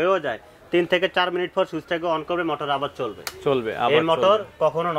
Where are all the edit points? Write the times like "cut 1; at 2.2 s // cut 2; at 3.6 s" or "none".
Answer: none